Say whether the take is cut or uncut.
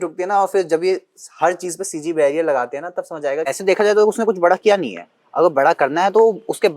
cut